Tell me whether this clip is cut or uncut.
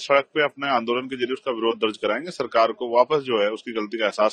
uncut